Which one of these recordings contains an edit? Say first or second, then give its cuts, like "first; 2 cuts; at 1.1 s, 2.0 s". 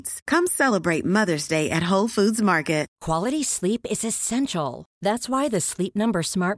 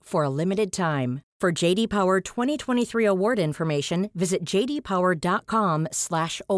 first; 1 cut; at 2.9 s